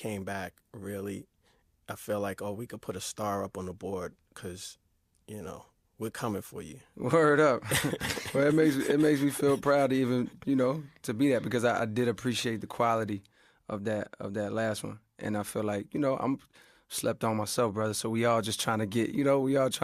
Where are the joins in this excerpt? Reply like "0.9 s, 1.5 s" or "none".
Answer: none